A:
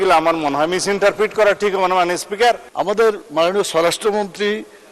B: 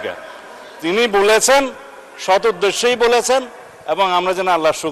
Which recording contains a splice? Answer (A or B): A